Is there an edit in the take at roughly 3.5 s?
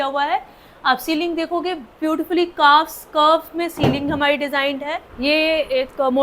no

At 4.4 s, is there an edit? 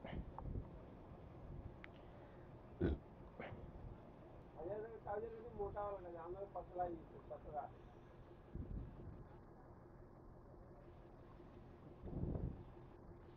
yes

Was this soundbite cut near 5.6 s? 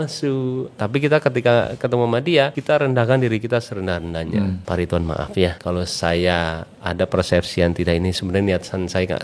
yes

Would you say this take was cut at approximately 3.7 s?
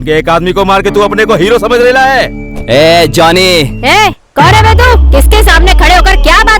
yes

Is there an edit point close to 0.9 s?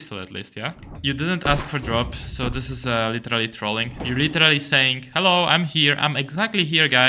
yes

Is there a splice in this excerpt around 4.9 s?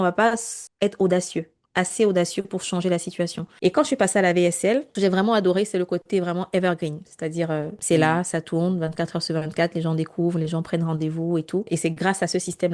yes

